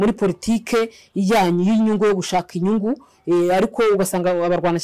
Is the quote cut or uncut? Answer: uncut